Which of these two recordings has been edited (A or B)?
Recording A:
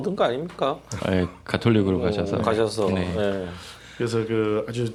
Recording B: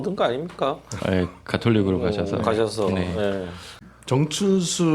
B